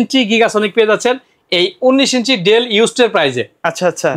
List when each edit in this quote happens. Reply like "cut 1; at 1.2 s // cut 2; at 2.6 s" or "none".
none

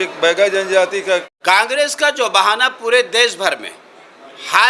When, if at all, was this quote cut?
cut 1; at 1.3 s

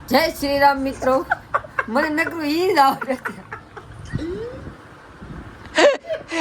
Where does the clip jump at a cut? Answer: none

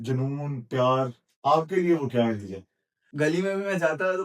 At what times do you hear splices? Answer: cut 1; at 3.0 s

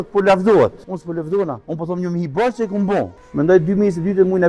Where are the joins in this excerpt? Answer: cut 1; at 1.4 s // cut 2; at 3.2 s

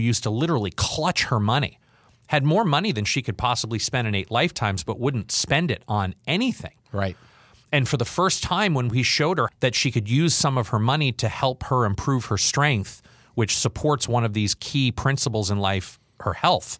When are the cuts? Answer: none

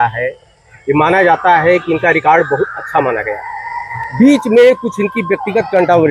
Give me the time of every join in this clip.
none

